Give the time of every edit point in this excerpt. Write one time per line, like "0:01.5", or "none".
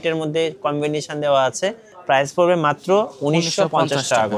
none